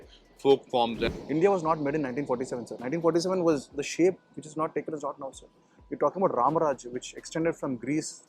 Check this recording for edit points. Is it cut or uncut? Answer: cut